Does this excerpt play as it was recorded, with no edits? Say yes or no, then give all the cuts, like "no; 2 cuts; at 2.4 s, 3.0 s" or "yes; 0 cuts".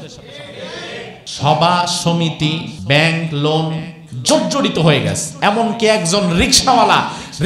no; 2 cuts; at 1.2 s, 2.7 s